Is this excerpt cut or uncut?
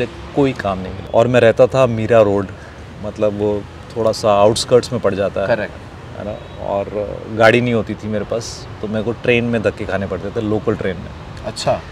cut